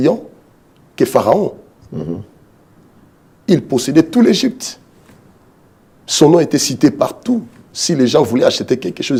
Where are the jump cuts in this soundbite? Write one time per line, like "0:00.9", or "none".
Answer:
none